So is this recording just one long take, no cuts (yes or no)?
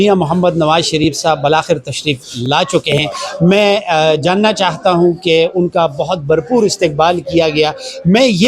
yes